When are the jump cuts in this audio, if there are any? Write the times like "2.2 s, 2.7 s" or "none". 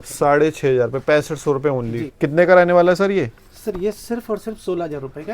2.0 s